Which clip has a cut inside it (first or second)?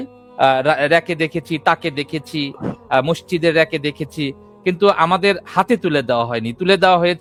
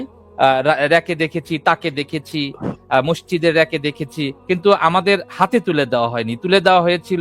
second